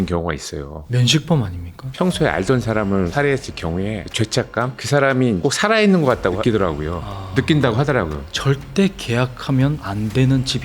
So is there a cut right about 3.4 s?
no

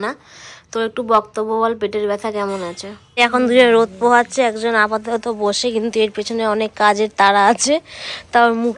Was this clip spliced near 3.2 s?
yes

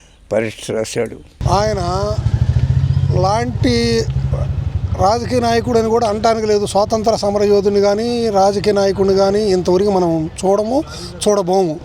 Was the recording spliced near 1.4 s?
yes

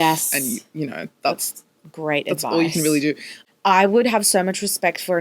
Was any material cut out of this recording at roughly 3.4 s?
yes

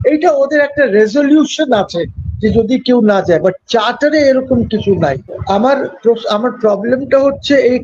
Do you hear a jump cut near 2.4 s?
no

